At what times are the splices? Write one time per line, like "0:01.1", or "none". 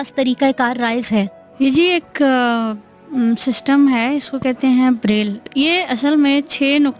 0:01.4
0:05.4